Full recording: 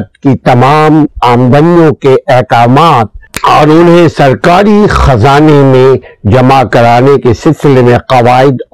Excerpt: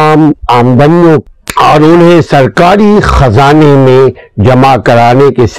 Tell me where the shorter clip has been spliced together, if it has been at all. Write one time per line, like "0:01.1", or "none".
0:01.2